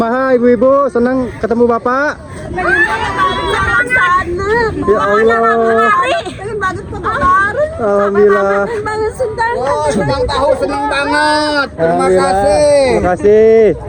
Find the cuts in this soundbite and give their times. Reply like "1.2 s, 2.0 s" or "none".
none